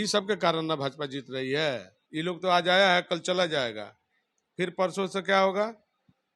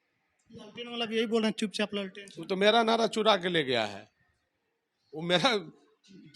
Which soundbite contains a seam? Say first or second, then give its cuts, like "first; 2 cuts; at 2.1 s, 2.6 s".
first; 1 cut; at 1.9 s